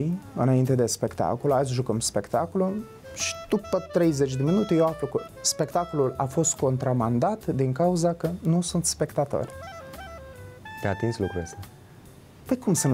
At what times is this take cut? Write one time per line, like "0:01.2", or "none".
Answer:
none